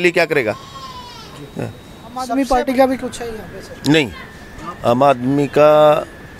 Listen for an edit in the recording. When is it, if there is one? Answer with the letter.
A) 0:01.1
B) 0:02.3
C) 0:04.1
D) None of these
B